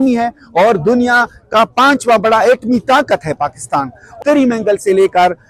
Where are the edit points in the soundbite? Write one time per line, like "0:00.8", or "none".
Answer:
0:04.2